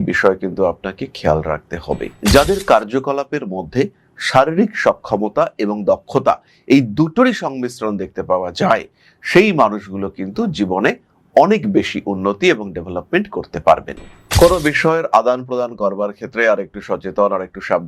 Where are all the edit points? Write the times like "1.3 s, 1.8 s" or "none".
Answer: 2.1 s, 14.2 s

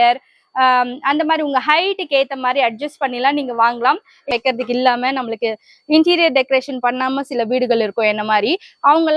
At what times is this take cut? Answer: 4.3 s

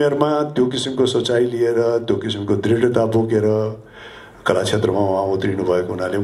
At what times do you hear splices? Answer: none

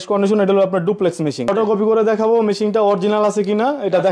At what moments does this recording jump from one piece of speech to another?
1.5 s

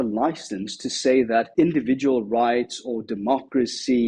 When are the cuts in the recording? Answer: 1.5 s

